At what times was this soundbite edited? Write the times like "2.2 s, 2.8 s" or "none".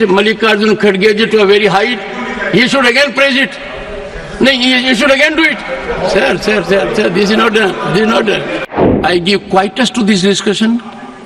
8.7 s